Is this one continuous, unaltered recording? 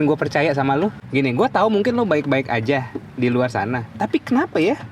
no; 1 cut; at 1.0 s

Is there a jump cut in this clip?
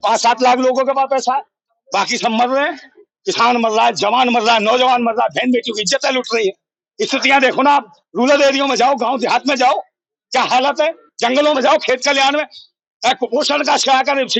no; 0 cuts

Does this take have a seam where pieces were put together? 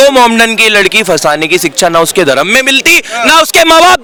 no; 0 cuts

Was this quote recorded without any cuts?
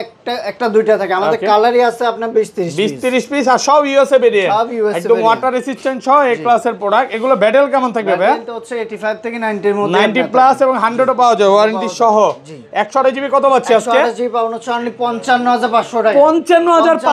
yes; 0 cuts

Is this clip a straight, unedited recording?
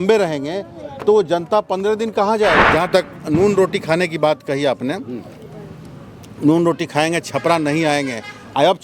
no; 1 cut; at 2.6 s

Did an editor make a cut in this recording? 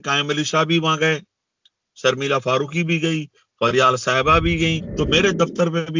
yes; 1 cut; at 4.8 s

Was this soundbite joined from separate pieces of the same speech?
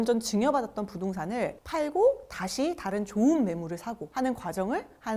yes; 1 cut; at 1.6 s

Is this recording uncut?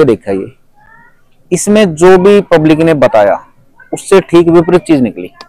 yes; 0 cuts

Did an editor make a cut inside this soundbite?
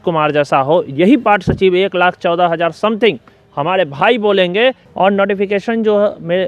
yes; 1 cut; at 4.8 s

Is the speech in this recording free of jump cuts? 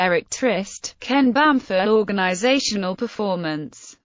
yes; 0 cuts

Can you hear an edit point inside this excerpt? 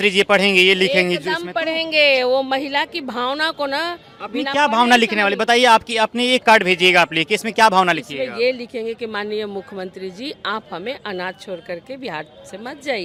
no; 0 cuts

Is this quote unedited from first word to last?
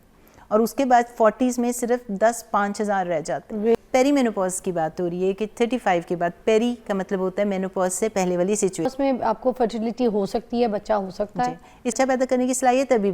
no; 3 cuts; at 3.8 s, 8.9 s, 12.0 s

